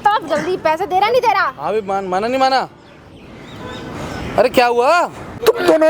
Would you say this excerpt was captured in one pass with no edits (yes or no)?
yes